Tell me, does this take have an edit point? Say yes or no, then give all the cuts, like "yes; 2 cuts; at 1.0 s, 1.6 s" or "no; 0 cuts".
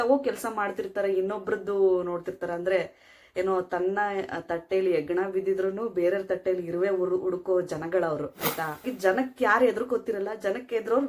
yes; 1 cut; at 8.8 s